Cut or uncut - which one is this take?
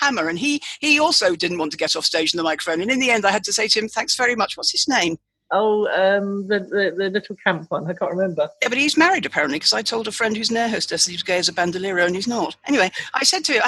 uncut